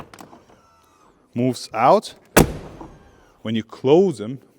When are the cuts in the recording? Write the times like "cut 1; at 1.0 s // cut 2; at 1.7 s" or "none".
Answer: none

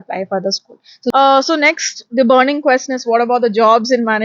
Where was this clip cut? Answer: cut 1; at 1.1 s

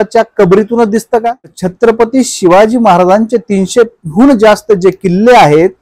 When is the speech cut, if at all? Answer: cut 1; at 1.6 s

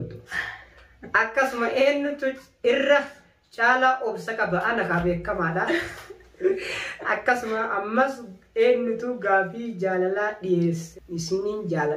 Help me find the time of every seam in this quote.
cut 1; at 10.9 s

